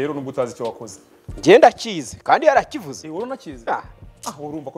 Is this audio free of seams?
yes; 0 cuts

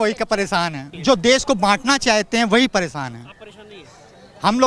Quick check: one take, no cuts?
no; 1 cut; at 0.9 s

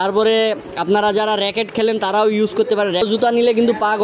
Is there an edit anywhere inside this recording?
yes; 1 cut; at 3.0 s

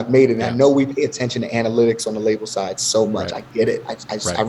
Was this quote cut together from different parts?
no; 0 cuts

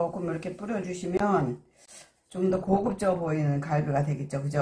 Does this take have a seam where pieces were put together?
no; 0 cuts

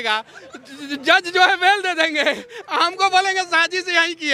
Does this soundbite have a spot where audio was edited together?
no; 0 cuts

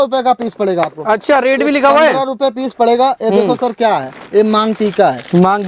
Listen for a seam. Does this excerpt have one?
no; 0 cuts

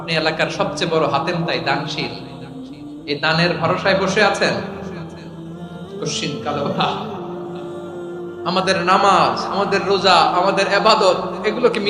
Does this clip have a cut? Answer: no; 0 cuts

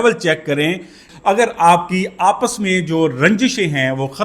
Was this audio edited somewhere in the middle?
yes; 1 cut; at 1.0 s

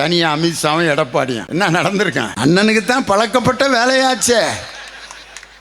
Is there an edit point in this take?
yes; 2 cuts; at 1.4 s, 2.3 s

